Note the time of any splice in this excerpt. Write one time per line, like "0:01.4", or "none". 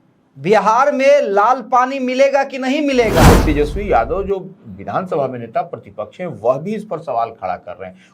0:03.3